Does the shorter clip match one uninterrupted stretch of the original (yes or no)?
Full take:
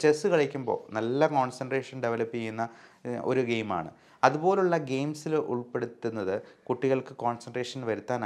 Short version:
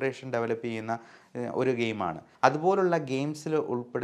no